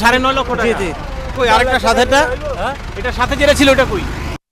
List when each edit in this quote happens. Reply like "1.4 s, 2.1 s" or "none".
1.3 s